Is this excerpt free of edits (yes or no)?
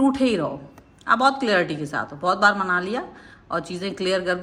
yes